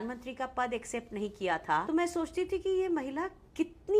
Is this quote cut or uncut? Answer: cut